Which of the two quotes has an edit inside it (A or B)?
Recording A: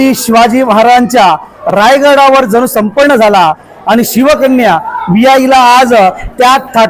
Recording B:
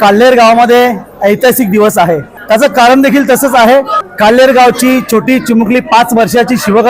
B